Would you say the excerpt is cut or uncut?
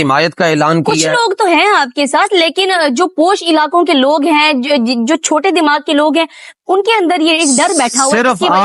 uncut